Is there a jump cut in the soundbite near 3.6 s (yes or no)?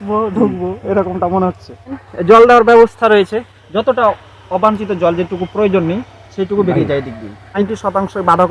yes